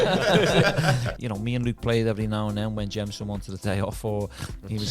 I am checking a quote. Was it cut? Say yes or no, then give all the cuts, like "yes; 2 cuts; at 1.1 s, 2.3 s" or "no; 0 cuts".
yes; 1 cut; at 1.1 s